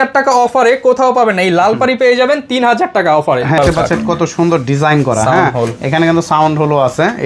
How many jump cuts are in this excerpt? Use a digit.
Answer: 1